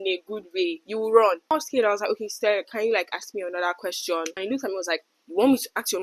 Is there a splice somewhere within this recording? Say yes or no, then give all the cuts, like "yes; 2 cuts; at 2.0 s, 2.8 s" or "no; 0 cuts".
yes; 2 cuts; at 1.5 s, 4.3 s